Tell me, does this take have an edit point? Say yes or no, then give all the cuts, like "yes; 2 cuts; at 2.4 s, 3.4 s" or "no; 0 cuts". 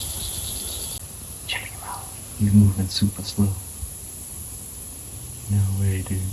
yes; 1 cut; at 0.9 s